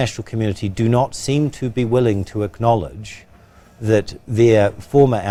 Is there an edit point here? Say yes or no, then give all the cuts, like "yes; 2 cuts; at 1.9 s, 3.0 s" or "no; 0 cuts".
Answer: no; 0 cuts